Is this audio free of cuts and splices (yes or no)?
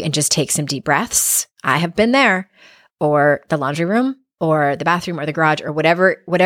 yes